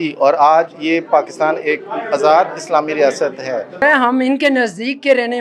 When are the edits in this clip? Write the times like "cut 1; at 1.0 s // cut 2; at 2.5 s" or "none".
cut 1; at 3.8 s